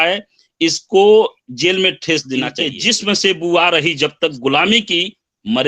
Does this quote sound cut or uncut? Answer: cut